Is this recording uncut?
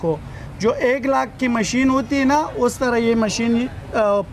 yes; 0 cuts

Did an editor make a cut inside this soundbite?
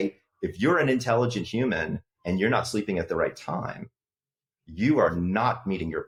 no; 0 cuts

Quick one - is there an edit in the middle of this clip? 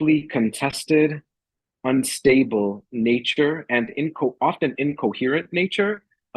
no; 0 cuts

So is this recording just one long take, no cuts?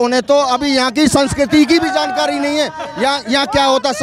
yes; 0 cuts

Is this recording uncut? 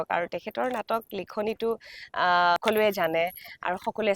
no; 1 cut; at 2.6 s

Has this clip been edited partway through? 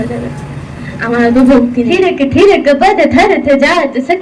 yes; 1 cut; at 1.9 s

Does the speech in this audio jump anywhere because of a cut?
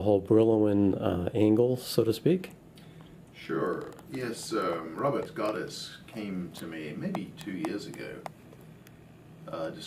yes; 1 cut; at 1.0 s

